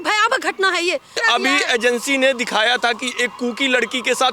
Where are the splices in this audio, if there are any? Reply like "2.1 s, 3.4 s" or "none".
1.2 s

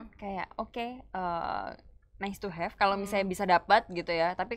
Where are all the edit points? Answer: none

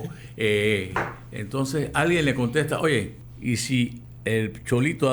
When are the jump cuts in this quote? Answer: 3.2 s, 4.1 s

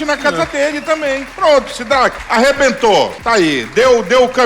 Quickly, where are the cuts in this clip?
1.3 s, 2.2 s, 3.2 s

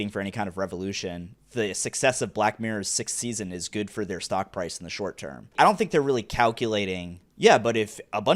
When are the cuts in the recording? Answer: 1.3 s, 5.5 s

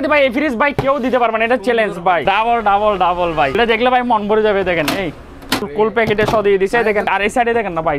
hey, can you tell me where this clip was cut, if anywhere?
2.2 s, 3.5 s, 5.7 s, 7.1 s

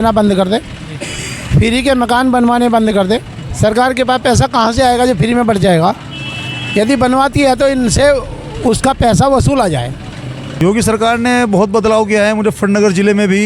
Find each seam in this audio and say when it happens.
10.6 s

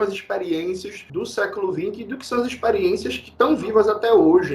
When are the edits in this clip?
0.9 s

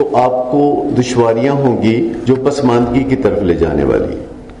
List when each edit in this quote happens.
2.2 s

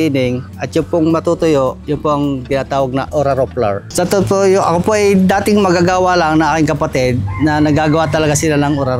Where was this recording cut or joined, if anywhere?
3.9 s

